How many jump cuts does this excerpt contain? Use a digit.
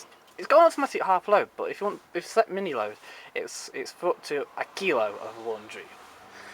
1